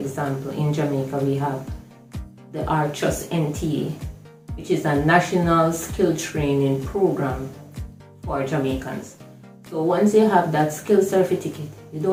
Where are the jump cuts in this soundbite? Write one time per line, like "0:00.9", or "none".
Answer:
none

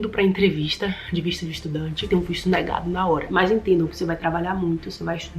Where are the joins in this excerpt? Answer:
0:02.0
0:03.3

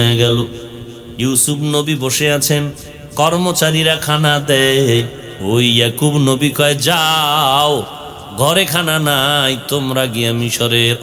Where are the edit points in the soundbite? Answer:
0:05.2

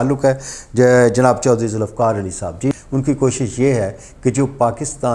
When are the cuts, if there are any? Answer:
0:02.7

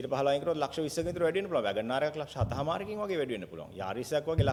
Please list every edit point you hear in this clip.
none

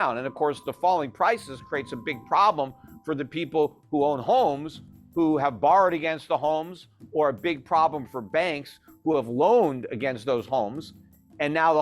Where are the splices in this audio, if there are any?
none

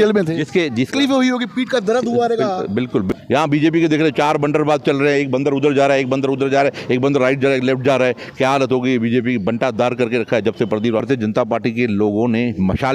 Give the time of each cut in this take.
0:00.9
0:03.1
0:11.0

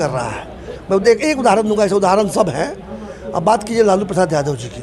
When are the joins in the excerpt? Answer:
none

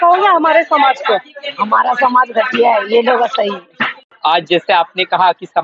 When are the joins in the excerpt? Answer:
0:04.1

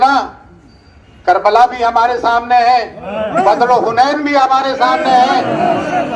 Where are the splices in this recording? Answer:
none

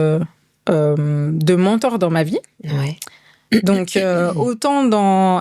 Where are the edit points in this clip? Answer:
none

